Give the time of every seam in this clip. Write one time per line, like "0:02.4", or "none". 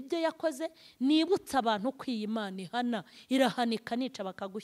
none